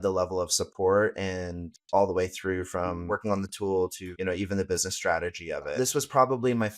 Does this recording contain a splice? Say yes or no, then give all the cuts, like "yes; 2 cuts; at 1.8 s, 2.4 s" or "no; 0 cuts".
yes; 3 cuts; at 3.0 s, 4.1 s, 5.7 s